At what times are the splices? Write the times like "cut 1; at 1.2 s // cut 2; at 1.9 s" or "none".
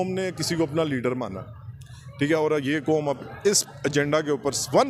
none